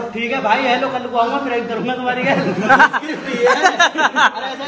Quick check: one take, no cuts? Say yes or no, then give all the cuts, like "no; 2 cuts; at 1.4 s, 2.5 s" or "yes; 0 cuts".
yes; 0 cuts